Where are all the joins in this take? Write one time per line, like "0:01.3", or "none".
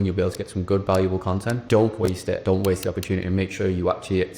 0:01.6
0:02.4